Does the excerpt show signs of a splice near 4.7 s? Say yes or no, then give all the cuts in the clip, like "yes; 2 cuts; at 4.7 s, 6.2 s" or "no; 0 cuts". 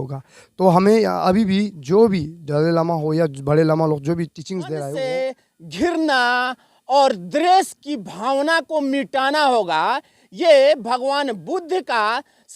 yes; 1 cut; at 4.7 s